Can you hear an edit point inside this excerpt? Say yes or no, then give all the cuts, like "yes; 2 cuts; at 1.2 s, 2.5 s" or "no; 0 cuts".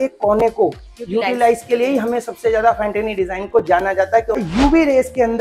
yes; 1 cut; at 4.4 s